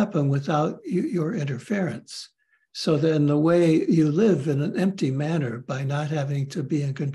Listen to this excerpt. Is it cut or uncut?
uncut